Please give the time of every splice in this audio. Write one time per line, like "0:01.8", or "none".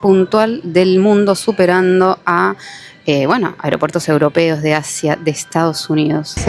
none

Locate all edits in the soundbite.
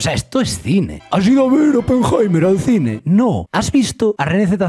0:00.9

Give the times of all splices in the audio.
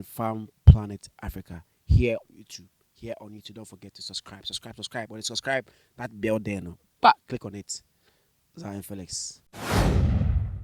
0:09.4

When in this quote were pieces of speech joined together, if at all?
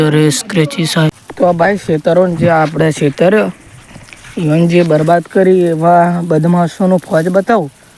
0:01.1

